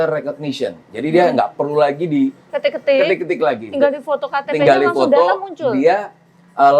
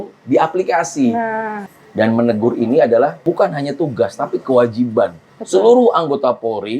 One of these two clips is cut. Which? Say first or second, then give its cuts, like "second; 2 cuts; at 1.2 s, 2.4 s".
second; 2 cuts; at 1.6 s, 3.2 s